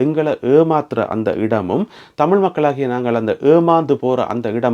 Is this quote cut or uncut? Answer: uncut